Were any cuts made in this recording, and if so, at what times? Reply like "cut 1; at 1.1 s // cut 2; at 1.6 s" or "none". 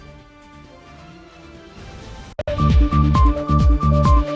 cut 1; at 2.4 s